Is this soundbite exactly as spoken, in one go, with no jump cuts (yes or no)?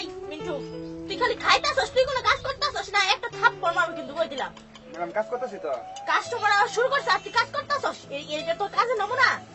yes